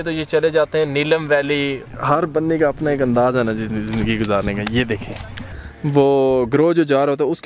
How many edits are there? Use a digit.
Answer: 2